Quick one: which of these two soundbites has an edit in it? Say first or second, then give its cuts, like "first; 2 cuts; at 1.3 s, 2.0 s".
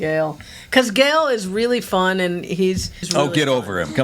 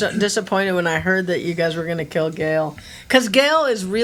first; 1 cut; at 3.0 s